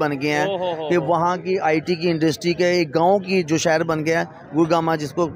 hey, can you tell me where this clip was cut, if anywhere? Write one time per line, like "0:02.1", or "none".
none